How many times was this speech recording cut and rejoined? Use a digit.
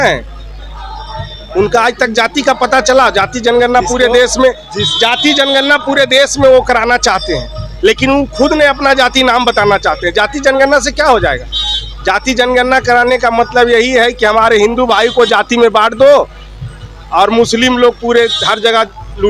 0